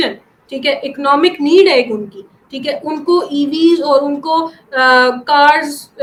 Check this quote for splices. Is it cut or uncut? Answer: uncut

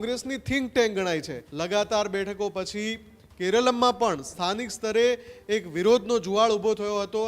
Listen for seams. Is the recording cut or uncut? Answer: cut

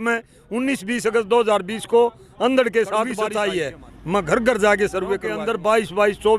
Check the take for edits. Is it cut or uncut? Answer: cut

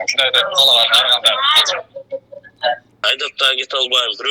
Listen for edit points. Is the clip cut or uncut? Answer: cut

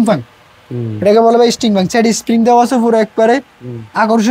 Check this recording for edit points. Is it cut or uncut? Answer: uncut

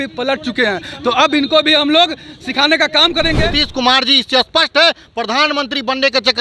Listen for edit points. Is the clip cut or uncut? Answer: cut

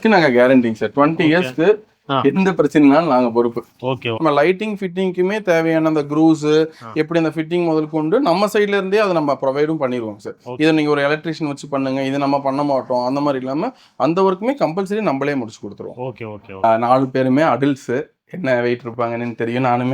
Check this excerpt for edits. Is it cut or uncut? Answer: cut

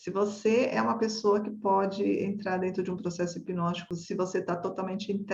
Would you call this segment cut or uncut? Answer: cut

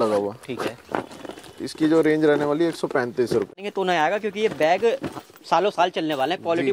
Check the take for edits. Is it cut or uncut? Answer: cut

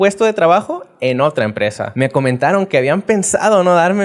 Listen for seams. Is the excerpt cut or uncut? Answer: cut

